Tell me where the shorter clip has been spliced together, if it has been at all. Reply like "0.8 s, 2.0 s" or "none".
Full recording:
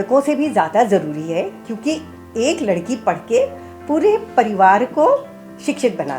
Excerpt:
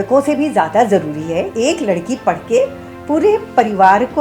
1.5 s